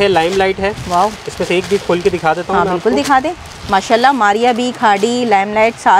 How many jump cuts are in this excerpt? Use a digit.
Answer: 0